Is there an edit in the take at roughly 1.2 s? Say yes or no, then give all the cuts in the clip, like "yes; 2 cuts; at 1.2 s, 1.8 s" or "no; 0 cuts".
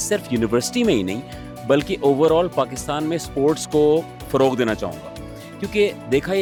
no; 0 cuts